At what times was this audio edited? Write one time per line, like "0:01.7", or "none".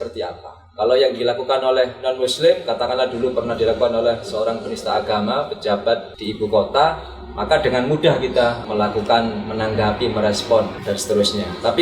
0:06.2
0:08.6
0:10.8